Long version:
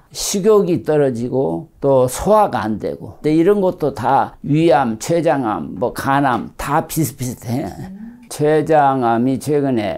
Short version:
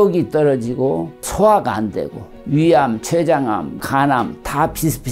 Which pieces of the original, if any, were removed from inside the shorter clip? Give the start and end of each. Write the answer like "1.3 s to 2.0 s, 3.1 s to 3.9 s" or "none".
1.8 s to 2.1 s, 3.2 s to 4.3 s, 5.8 s to 5.9 s